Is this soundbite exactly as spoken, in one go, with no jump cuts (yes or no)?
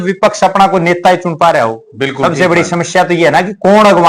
yes